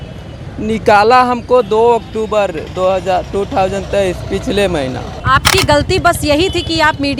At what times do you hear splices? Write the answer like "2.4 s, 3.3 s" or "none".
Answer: 5.1 s